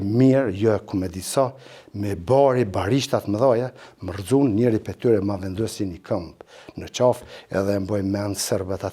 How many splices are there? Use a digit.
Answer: 0